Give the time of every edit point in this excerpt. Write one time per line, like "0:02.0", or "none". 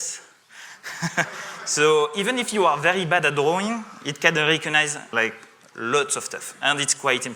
0:05.1